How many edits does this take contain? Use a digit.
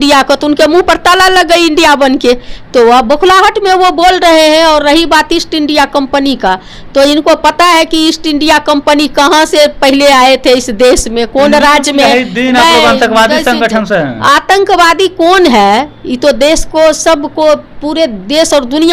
0